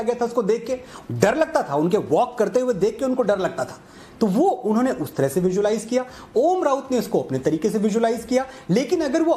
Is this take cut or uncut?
uncut